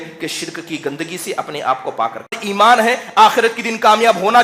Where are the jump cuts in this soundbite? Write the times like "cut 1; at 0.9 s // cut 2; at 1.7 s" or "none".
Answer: cut 1; at 2.4 s

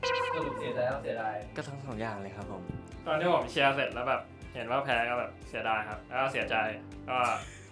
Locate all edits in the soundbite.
none

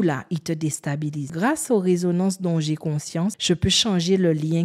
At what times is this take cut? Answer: cut 1; at 1.3 s // cut 2; at 3.4 s

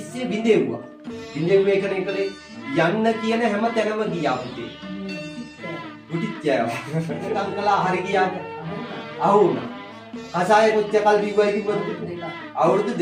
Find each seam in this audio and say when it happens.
cut 1; at 7.4 s

